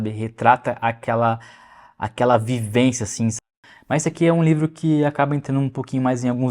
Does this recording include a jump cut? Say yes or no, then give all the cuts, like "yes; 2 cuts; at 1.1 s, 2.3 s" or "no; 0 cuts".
yes; 1 cut; at 3.4 s